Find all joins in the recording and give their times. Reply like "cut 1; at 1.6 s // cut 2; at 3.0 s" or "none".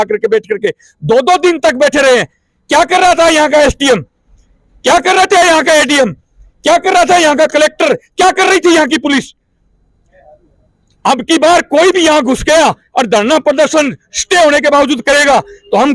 none